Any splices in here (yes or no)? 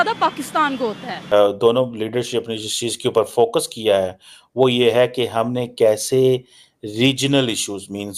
yes